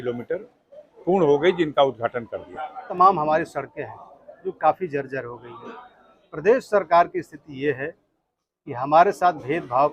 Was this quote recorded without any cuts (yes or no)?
no